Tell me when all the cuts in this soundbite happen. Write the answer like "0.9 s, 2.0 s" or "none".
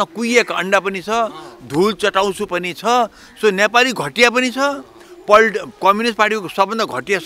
none